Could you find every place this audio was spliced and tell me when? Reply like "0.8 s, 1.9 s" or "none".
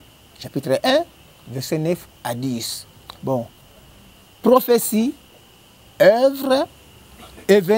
none